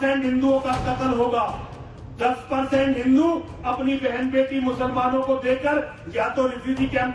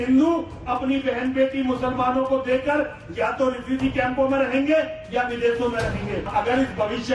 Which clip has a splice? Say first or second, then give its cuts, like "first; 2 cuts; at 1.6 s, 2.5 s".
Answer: second; 1 cut; at 6.3 s